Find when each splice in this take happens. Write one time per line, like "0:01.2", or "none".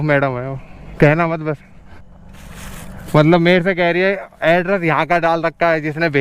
0:02.0